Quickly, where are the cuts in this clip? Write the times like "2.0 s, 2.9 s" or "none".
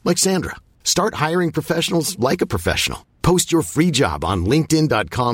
none

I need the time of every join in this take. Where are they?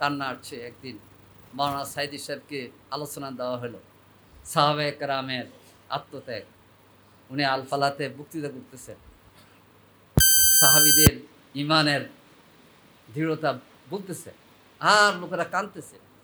none

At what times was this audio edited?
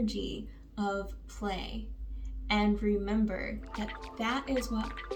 none

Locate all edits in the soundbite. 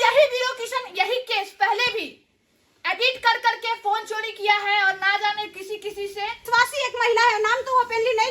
6.4 s

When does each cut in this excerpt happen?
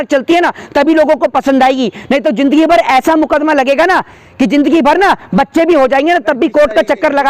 none

